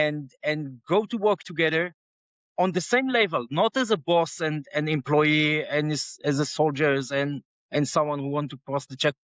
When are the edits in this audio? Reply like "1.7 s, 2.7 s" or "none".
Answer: none